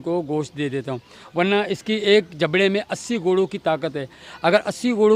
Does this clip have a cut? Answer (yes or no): no